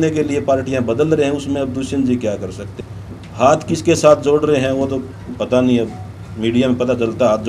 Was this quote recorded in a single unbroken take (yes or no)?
no